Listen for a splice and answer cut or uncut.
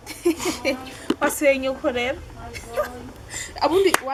uncut